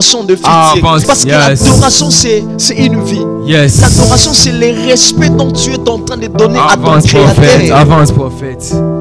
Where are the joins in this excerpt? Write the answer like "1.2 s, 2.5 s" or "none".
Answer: 1.0 s